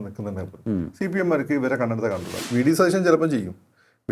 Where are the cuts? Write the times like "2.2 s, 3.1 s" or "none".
2.3 s